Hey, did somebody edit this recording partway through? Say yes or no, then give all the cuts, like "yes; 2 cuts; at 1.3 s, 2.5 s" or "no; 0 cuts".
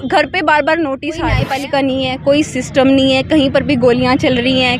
yes; 1 cut; at 1.4 s